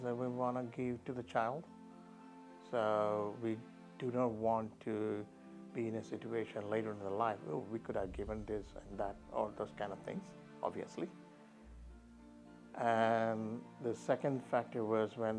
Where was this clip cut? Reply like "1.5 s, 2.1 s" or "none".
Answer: none